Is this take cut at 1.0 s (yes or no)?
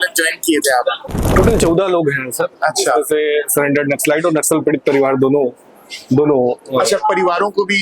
yes